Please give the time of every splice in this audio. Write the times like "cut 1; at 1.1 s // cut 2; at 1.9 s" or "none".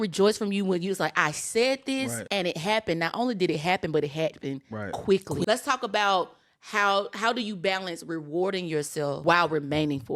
cut 1; at 2.2 s // cut 2; at 5.4 s // cut 3; at 9.2 s

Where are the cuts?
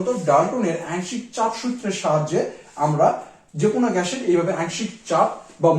none

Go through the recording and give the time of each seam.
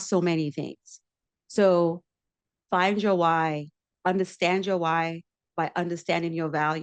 cut 1; at 3.8 s

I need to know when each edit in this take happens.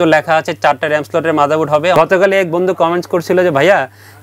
cut 1; at 2.0 s

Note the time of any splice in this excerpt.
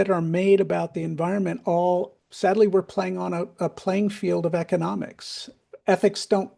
cut 1; at 2.2 s // cut 2; at 5.6 s

